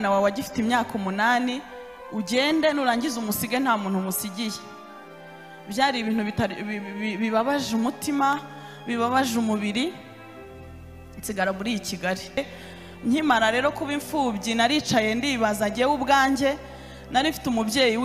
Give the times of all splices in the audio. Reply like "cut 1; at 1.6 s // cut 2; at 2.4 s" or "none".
cut 1; at 12.4 s